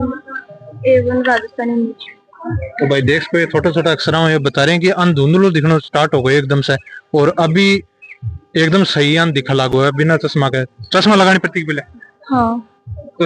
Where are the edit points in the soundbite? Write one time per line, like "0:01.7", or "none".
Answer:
none